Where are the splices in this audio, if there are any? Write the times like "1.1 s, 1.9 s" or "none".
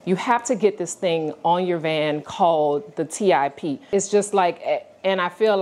3.9 s